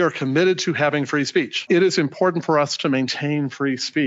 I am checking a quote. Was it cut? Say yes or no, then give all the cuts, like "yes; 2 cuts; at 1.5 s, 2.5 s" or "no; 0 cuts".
yes; 1 cut; at 1.6 s